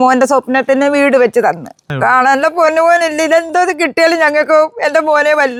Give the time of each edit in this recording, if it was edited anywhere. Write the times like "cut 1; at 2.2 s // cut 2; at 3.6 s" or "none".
none